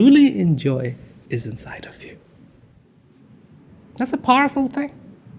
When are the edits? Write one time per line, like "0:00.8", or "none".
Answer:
0:03.6